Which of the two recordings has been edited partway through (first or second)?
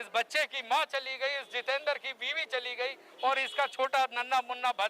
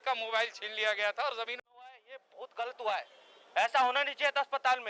second